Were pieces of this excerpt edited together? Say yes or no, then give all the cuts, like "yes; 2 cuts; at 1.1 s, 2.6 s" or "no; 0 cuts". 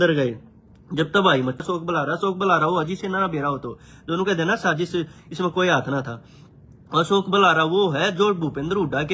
yes; 1 cut; at 1.6 s